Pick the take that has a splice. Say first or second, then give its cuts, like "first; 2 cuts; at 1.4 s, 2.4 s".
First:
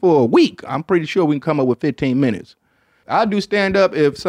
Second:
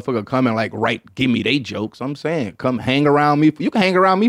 first; 1 cut; at 3.0 s